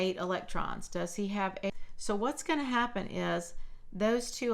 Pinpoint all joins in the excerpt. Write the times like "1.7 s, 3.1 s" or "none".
1.7 s